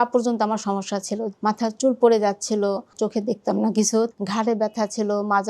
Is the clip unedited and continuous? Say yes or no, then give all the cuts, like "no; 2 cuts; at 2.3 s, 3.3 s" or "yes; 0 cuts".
no; 3 cuts; at 1.3 s, 2.9 s, 4.1 s